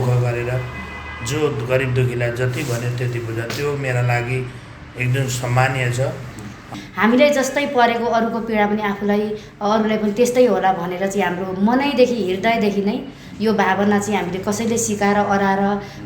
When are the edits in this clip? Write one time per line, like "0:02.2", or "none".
0:06.8